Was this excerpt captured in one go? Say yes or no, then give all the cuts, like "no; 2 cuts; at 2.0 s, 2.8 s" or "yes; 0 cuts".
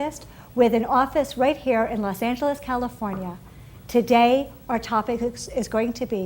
no; 1 cut; at 1.3 s